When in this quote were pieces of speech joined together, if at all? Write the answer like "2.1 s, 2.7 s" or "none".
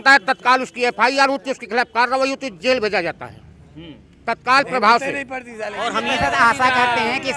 6.0 s